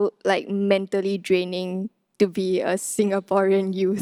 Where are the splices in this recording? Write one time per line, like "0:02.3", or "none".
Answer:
none

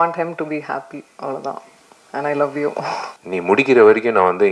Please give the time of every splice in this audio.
0:03.1

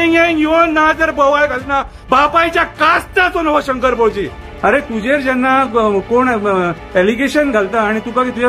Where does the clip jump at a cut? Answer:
0:04.5

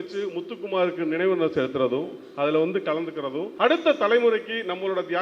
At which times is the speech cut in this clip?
0:03.5

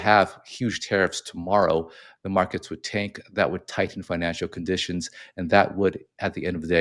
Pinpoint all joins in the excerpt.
none

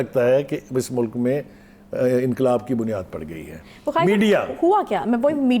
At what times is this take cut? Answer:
none

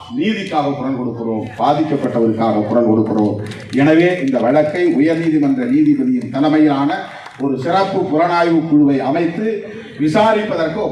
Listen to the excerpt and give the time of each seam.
none

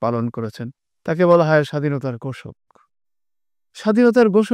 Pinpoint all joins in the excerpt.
none

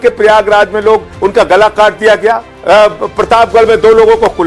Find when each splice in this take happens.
0:01.1
0:02.5

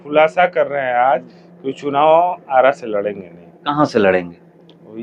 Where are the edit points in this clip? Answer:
none

